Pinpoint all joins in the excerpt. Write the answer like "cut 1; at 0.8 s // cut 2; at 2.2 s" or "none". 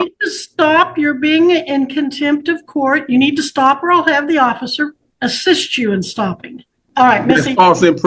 cut 1; at 5.0 s // cut 2; at 6.8 s